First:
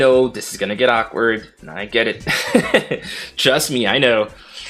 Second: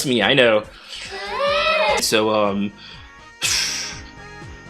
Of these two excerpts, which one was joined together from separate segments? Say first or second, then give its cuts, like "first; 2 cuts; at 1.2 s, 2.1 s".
second; 1 cut; at 2.0 s